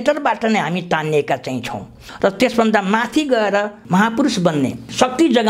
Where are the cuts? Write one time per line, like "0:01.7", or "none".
0:02.1
0:03.8

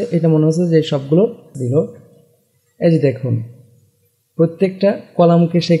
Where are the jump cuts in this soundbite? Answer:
0:01.5

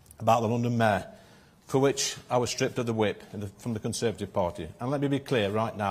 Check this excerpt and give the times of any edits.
none

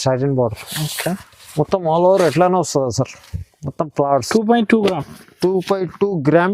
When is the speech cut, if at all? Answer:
0:04.3

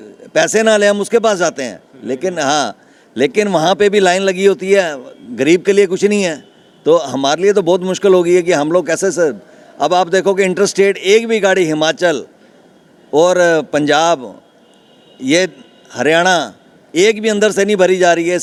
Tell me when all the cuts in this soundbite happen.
none

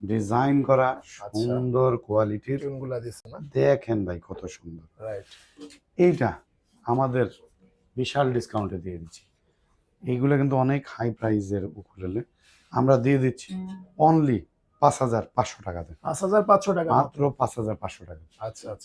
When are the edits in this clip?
none

